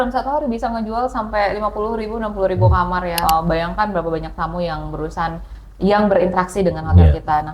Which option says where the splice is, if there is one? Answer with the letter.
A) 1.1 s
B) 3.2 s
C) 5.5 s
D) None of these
B